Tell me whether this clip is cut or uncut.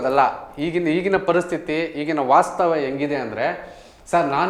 uncut